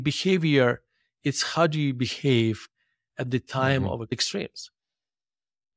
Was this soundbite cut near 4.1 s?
yes; 1 cut; at 4.1 s

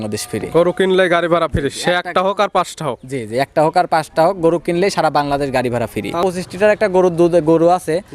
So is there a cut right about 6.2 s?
yes; 1 cut; at 6.2 s

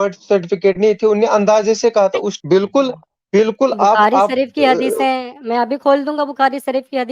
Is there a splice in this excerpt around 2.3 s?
yes; 1 cut; at 2.3 s

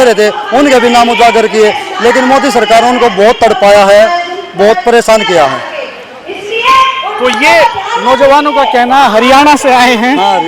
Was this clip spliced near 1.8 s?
no; 0 cuts

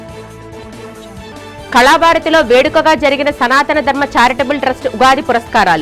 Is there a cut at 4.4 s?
no; 1 cut; at 1.3 s

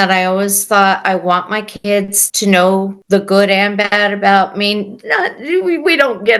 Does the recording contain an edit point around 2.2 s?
yes; 2 cuts; at 2.2 s, 3.0 s

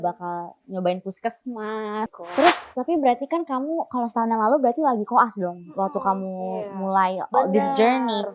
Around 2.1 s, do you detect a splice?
yes; 1 cut; at 2.1 s

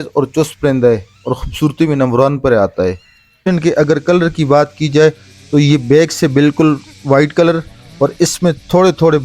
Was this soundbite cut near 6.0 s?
no; 1 cut; at 3.5 s

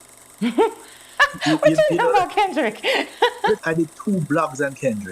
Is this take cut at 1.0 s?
no; 1 cut; at 3.6 s

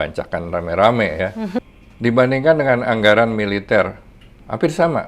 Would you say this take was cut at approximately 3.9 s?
no; 1 cut; at 1.6 s

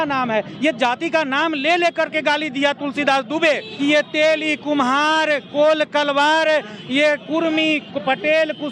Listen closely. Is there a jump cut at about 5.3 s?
no; 1 cut; at 3.7 s

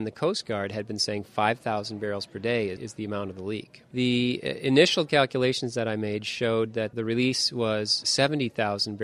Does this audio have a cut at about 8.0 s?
yes; 3 cuts; at 3.9 s, 6.9 s, 8.0 s

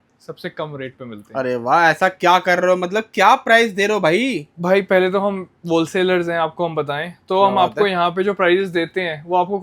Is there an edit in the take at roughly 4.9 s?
no; 0 cuts

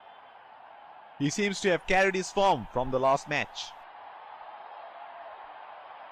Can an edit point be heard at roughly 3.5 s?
yes; 2 cuts; at 1.2 s, 3.5 s

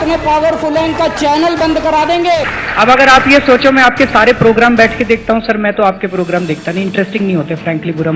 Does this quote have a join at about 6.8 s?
no; 1 cut; at 2.6 s

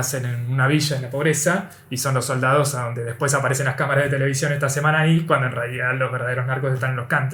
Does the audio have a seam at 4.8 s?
no; 0 cuts

